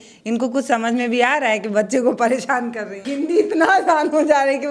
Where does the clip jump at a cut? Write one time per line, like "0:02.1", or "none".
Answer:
0:03.0